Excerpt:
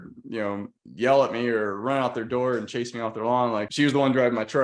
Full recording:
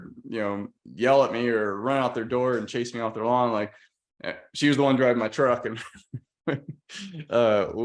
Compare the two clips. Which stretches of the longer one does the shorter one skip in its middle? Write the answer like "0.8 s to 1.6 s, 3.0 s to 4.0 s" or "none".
3.7 s to 4.5 s